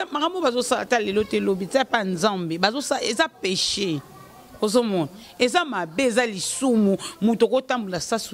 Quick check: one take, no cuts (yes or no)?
yes